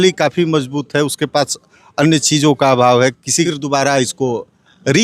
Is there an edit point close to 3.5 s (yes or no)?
yes